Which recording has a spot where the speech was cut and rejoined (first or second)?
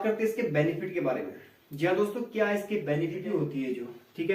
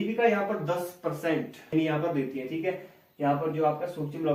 first